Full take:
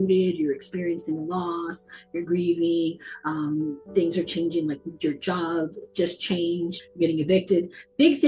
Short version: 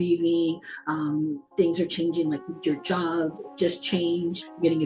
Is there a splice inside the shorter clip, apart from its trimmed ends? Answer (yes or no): no